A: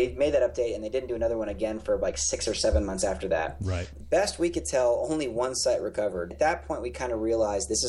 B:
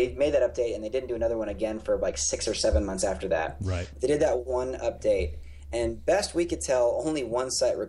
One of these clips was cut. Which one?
A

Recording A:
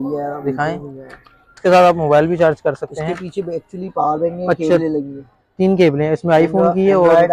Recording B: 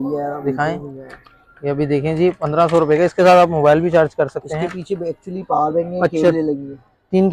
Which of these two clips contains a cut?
A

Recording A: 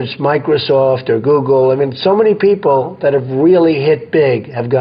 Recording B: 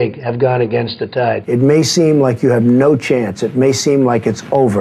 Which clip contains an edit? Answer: B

